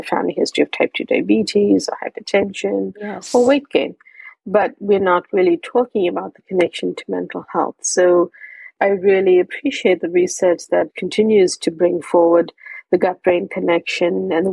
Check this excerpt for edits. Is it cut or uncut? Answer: cut